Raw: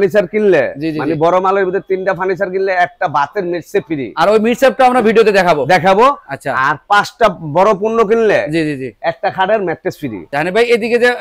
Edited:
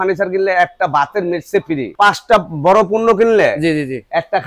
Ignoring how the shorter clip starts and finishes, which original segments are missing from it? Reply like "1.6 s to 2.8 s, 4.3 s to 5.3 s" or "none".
4.1 s to 6.8 s